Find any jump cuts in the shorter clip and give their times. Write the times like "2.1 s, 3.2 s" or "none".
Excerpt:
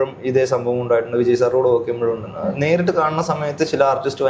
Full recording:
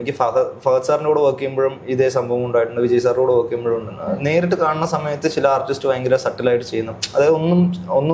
none